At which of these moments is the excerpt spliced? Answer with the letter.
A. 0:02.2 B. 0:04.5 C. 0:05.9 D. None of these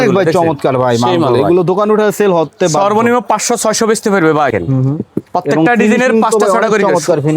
B